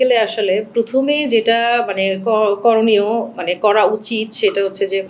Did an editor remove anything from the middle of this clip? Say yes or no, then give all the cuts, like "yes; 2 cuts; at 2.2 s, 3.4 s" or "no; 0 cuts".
no; 0 cuts